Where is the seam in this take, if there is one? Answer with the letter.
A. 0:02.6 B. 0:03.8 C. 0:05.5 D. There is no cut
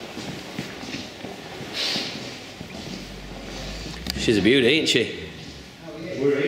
D